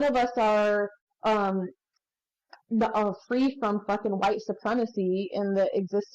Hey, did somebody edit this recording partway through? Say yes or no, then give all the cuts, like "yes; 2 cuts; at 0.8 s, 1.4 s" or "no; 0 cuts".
yes; 1 cut; at 1.0 s